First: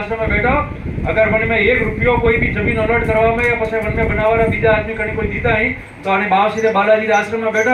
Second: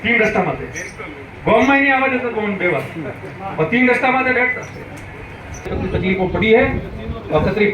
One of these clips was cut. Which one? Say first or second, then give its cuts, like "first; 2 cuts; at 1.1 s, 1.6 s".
second; 1 cut; at 5.7 s